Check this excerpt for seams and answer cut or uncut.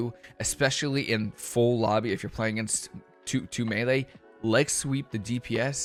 uncut